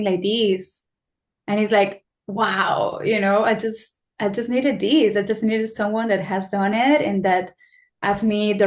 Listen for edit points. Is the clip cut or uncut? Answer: uncut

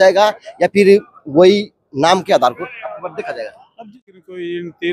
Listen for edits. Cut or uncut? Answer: cut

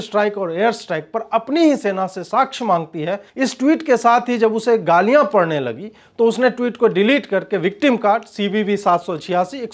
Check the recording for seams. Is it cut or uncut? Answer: cut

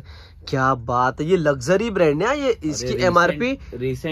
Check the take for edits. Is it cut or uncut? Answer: uncut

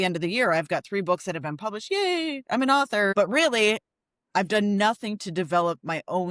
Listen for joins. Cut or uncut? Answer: cut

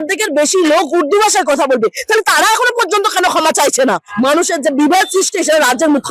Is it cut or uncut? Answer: cut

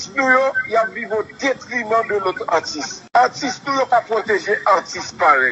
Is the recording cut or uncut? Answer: cut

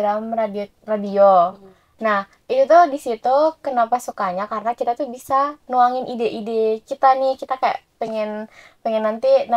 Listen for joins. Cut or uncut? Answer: uncut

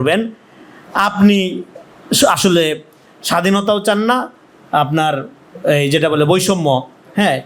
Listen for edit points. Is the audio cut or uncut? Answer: uncut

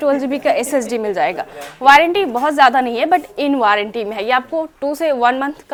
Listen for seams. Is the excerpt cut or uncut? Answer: uncut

